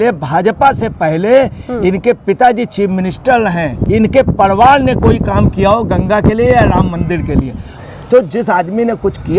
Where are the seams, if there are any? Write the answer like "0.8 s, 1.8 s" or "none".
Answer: 3.8 s, 7.7 s